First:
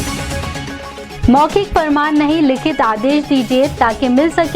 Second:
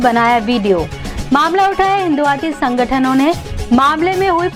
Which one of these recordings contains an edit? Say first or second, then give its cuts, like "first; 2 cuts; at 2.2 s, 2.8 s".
first; 1 cut; at 1.1 s